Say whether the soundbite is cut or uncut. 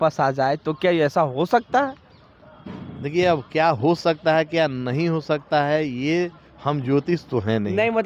uncut